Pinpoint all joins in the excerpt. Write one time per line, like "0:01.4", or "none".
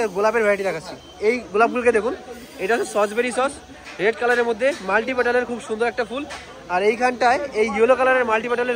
none

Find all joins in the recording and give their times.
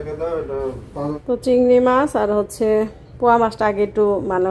0:01.1

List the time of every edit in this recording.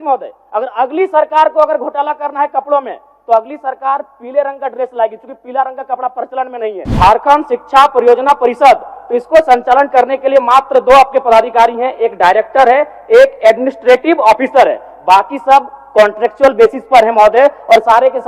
0:06.8

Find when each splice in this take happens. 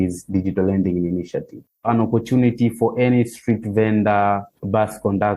0:01.9

